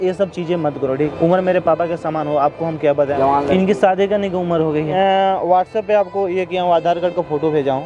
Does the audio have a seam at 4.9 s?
yes; 3 cuts; at 0.9 s, 3.1 s, 4.9 s

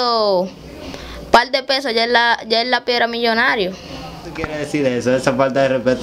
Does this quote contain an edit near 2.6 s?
no; 1 cut; at 4.5 s

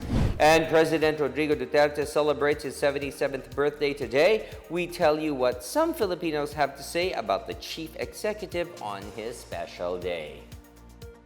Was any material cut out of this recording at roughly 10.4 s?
yes; 1 cut; at 10.4 s

